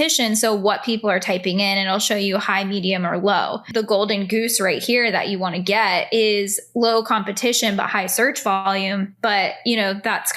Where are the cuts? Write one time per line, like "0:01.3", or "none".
0:03.7